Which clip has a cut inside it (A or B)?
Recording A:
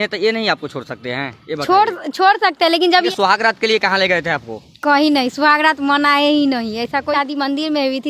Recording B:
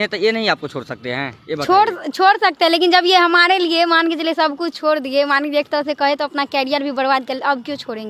A